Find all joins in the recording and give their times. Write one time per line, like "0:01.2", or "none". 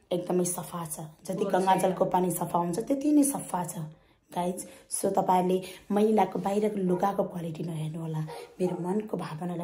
none